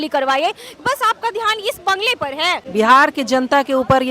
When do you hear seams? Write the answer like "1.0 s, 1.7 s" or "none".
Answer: 2.6 s